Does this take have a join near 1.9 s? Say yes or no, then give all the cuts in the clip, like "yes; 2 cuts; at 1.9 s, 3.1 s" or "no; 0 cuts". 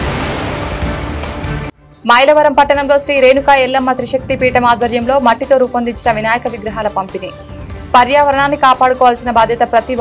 yes; 2 cuts; at 0.9 s, 1.9 s